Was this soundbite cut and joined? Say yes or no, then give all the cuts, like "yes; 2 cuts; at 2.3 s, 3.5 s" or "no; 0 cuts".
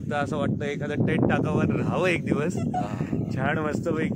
no; 0 cuts